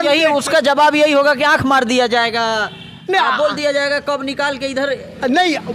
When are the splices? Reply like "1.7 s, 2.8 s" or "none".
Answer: none